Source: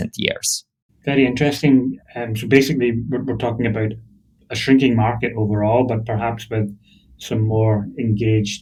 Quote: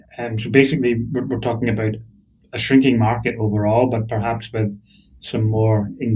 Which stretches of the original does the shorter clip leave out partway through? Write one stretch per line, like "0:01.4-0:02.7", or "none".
none